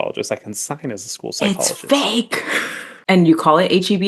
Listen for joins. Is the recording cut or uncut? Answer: cut